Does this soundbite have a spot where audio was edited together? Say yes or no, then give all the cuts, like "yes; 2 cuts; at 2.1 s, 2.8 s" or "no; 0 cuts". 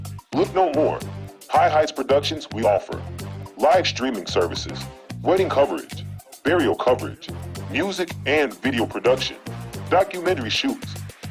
no; 0 cuts